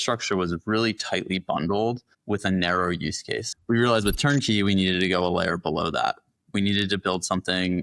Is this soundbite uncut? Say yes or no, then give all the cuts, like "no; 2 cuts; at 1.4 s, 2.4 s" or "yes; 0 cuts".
no; 1 cut; at 3.5 s